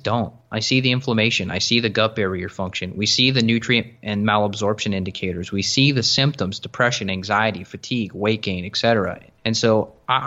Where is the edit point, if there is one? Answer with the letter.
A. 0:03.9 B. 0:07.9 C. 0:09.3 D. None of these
C